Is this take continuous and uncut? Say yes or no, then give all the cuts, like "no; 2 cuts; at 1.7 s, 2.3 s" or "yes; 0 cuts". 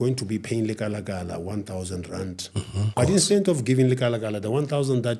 no; 1 cut; at 2.9 s